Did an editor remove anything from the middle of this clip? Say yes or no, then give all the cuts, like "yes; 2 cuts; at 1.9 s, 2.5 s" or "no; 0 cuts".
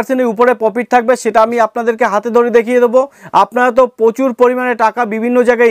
yes; 1 cut; at 3.2 s